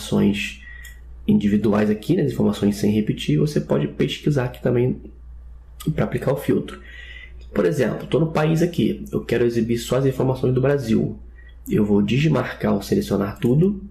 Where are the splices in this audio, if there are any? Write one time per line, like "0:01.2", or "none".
0:02.9